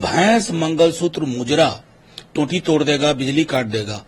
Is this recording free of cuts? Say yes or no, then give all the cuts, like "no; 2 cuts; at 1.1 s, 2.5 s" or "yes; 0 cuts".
yes; 0 cuts